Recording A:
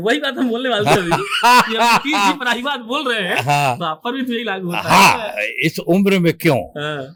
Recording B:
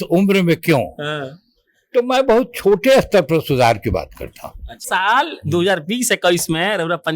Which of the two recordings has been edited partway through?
B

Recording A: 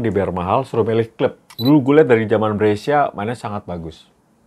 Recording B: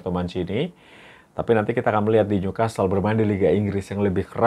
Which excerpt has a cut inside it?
A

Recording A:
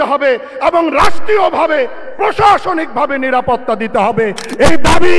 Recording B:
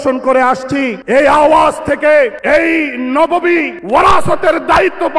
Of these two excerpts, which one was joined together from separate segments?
B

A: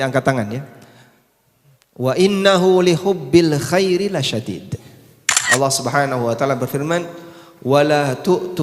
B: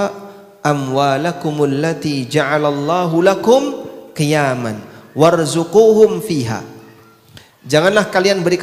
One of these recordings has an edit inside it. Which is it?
A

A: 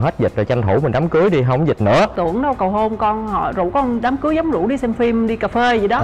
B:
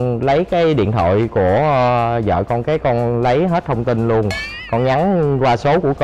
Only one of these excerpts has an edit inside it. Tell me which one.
A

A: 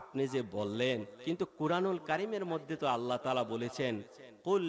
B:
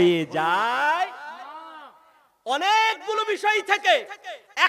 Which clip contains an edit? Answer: A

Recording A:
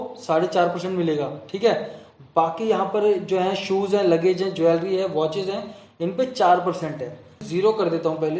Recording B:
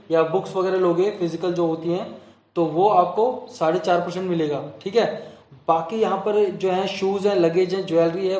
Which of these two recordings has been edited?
A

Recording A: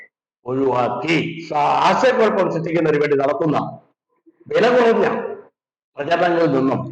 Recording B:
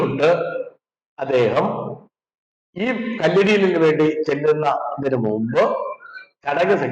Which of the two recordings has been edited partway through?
A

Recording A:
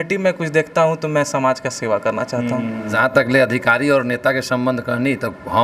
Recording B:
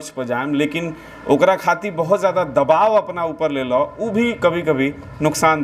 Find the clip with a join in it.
A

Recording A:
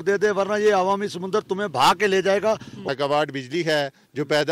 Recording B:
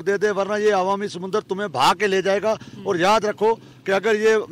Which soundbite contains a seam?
A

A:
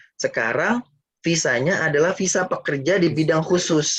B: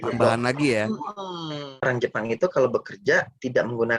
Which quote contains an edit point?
B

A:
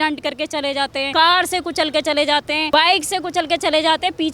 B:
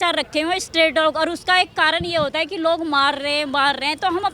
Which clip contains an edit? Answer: A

